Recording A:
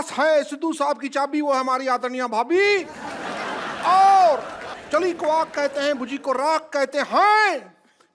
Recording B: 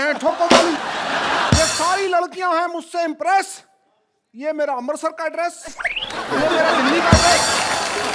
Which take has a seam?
B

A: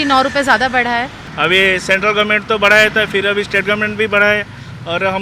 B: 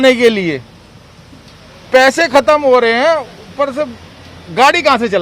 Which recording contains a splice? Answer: A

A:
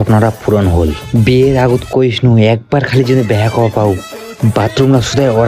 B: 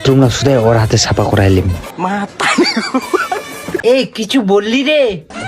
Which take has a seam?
B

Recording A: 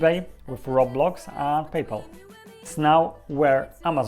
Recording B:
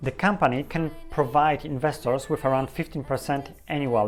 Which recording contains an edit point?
A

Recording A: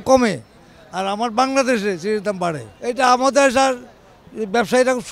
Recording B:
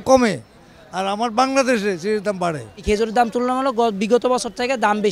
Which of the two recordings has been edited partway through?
B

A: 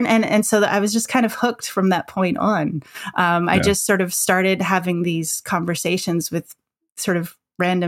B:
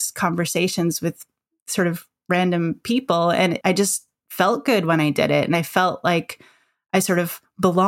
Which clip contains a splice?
B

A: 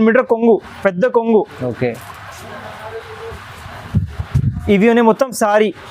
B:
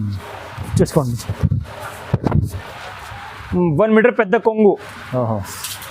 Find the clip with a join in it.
B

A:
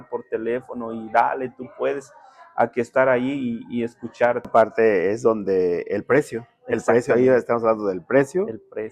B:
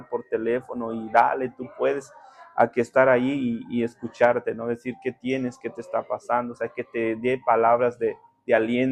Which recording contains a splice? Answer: A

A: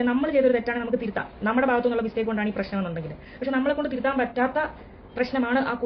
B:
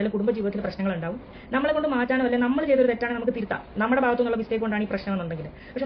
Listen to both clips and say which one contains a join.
B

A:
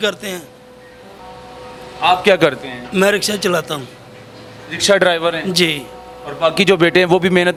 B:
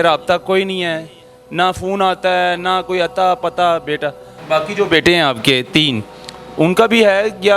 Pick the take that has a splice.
B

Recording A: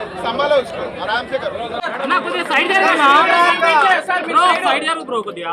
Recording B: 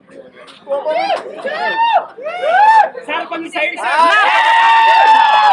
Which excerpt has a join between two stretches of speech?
A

